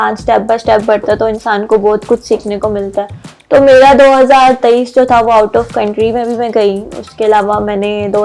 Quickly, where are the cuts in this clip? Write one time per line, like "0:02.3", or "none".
none

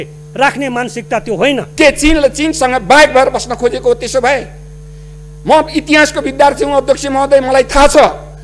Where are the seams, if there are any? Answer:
0:01.7

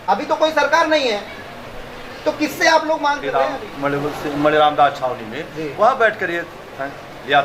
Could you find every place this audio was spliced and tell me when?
0:03.2

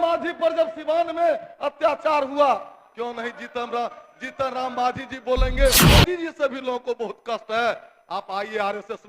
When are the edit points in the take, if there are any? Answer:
0:05.8

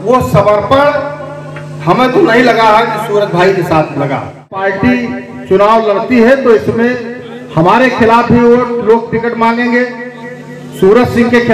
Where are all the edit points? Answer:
0:04.6

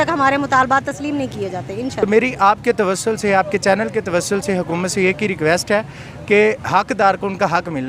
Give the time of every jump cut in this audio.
0:02.0

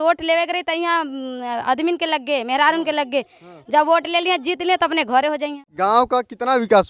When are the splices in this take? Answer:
0:05.6

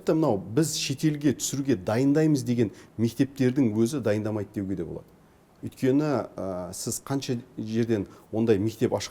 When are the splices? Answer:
none

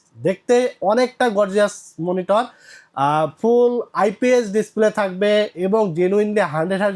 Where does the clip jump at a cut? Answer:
none

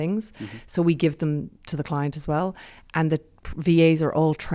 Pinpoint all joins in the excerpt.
none

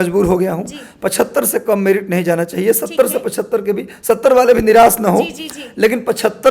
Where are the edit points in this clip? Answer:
none

